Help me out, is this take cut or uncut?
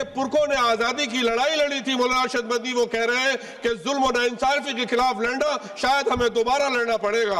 uncut